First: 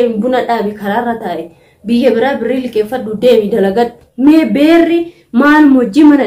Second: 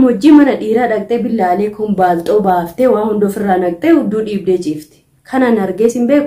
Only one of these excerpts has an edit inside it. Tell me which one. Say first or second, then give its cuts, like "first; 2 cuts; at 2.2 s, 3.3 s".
first; 1 cut; at 4.0 s